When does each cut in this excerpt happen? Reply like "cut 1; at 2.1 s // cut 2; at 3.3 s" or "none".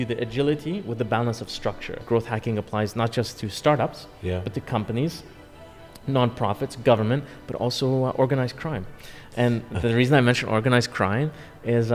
cut 1; at 2.0 s